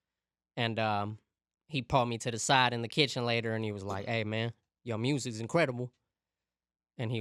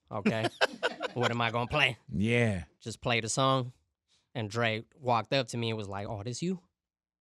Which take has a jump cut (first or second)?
second